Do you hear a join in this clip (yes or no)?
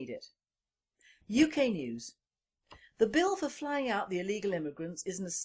yes